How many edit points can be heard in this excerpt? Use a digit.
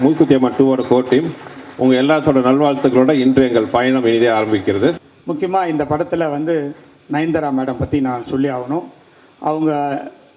1